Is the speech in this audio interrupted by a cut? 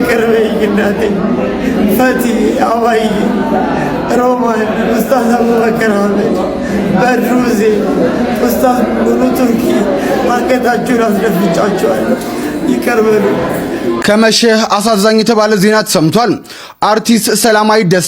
yes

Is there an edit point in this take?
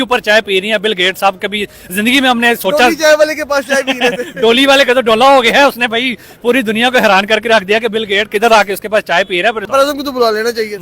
yes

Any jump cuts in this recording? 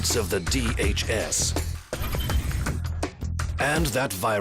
no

